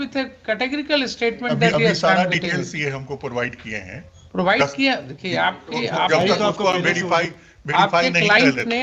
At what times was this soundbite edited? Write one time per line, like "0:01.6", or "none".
none